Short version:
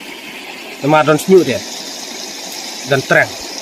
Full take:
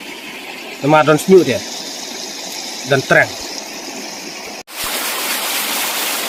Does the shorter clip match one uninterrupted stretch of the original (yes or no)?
yes